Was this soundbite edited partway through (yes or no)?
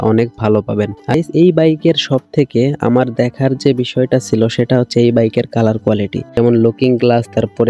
yes